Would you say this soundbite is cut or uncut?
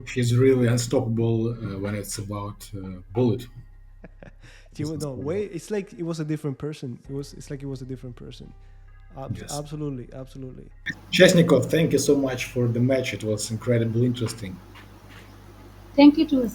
cut